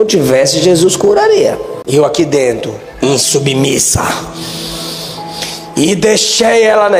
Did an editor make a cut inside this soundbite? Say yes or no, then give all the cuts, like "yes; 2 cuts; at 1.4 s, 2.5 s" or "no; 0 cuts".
yes; 1 cut; at 1.7 s